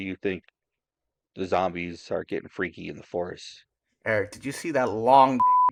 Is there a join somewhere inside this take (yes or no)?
no